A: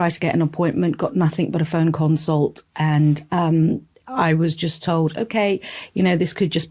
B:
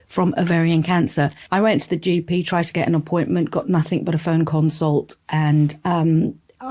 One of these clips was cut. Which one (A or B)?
B